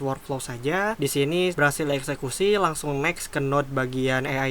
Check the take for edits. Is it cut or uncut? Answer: cut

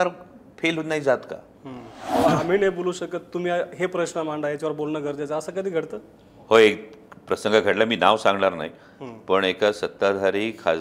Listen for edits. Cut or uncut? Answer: cut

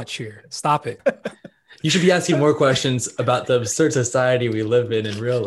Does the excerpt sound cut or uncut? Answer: cut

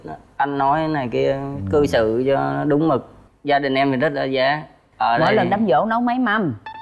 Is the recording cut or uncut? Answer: cut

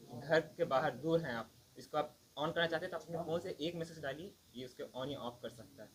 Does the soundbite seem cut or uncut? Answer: uncut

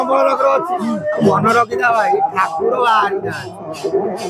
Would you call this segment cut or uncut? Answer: cut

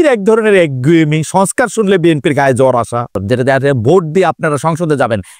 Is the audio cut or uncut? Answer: cut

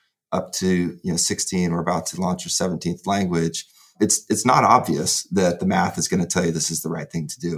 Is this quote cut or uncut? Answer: uncut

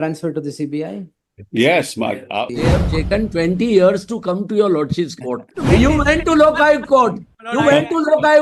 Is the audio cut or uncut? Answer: cut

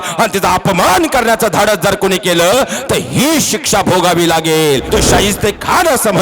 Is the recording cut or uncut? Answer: cut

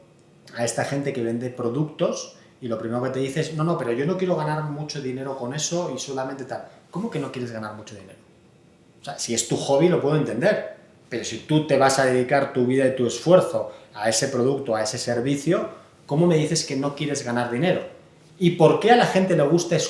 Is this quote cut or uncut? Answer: uncut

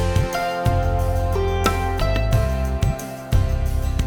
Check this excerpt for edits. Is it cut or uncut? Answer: uncut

